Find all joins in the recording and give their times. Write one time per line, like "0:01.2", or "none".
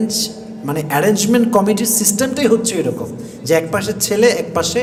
none